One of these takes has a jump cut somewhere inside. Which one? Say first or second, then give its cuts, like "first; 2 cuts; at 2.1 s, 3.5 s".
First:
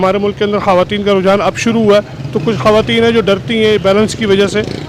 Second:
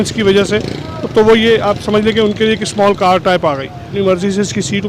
second; 1 cut; at 3.9 s